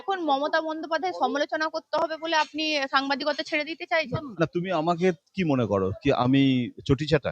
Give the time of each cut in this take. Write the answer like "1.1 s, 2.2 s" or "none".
4.2 s